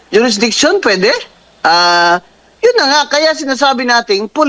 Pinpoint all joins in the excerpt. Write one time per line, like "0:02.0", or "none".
none